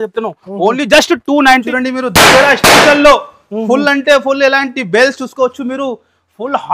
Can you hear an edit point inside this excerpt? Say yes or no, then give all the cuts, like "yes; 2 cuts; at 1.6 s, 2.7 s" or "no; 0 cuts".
yes; 1 cut; at 1.6 s